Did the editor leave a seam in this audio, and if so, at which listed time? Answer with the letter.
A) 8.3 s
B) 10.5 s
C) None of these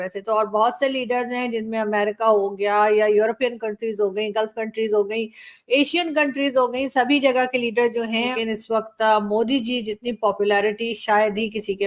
A